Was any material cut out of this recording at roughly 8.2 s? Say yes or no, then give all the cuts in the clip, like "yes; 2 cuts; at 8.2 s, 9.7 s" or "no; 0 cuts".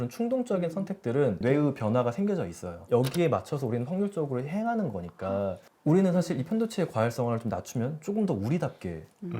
no; 2 cuts; at 1.4 s, 2.8 s